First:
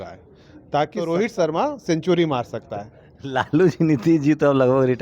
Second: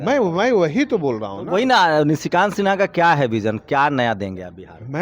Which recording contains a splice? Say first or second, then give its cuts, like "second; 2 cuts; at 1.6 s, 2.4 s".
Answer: first; 1 cut; at 1.0 s